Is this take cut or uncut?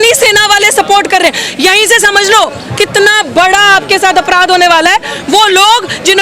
uncut